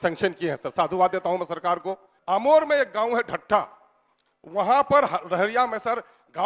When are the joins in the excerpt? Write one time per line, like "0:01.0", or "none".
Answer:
0:02.1